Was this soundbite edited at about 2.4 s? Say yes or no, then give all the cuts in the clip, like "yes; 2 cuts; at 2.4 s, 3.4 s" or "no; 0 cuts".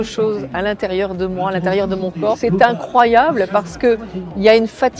yes; 1 cut; at 2.4 s